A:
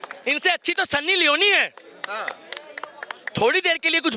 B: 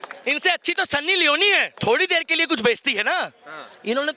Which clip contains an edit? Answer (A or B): B